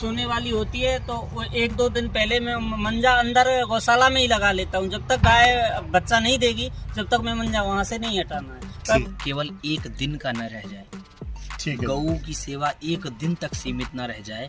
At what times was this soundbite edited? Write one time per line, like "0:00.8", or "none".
0:09.1